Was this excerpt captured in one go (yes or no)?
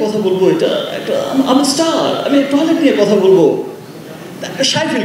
yes